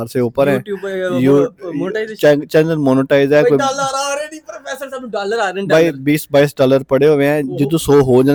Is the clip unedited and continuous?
yes; 0 cuts

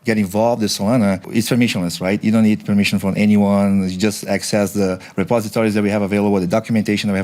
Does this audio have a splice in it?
yes; 1 cut; at 1.2 s

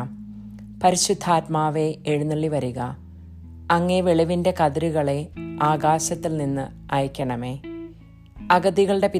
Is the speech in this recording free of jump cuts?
yes; 0 cuts

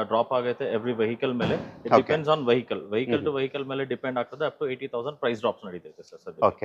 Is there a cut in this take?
no; 0 cuts

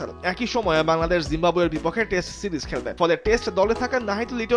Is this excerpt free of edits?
yes; 0 cuts

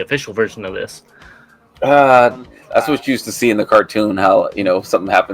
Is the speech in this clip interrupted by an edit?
yes; 1 cut; at 2.5 s

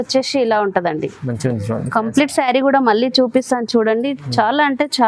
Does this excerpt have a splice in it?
no; 0 cuts

